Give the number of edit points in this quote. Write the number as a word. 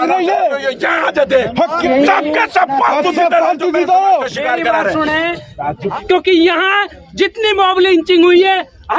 two